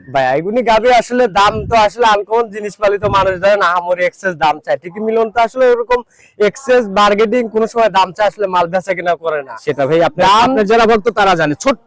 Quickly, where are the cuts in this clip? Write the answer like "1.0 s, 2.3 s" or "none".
none